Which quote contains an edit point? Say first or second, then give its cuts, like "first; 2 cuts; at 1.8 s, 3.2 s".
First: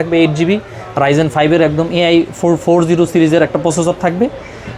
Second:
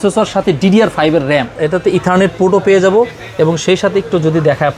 second; 1 cut; at 1.5 s